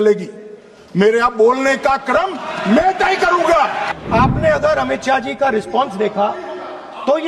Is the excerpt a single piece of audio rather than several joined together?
no; 1 cut; at 3.9 s

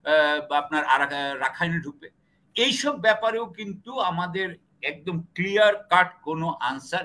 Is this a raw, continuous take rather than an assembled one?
yes; 0 cuts

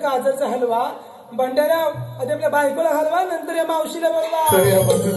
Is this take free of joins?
yes; 0 cuts

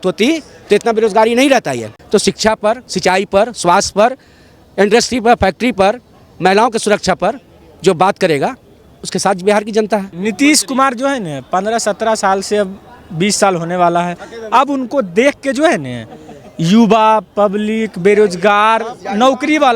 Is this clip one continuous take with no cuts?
no; 2 cuts; at 1.9 s, 10.1 s

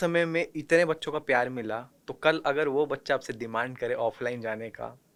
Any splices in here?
no; 0 cuts

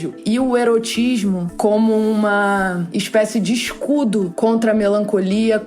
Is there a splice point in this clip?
yes; 2 cuts; at 2.9 s, 4.3 s

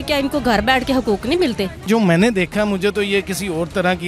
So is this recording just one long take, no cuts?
no; 1 cut; at 1.9 s

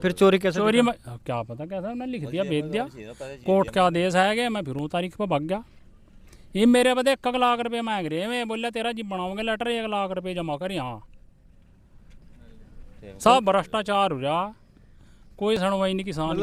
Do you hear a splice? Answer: no; 0 cuts

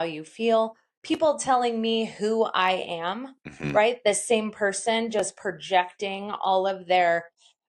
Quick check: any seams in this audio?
no; 0 cuts

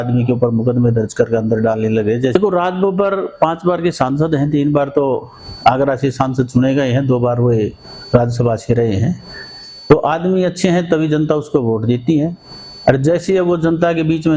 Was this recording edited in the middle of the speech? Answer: yes; 1 cut; at 2.4 s

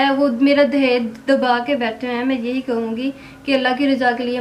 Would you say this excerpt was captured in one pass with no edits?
yes; 0 cuts

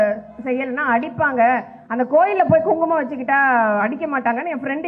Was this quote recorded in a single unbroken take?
yes; 0 cuts

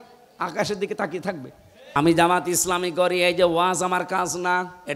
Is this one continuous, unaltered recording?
no; 1 cut; at 2.0 s

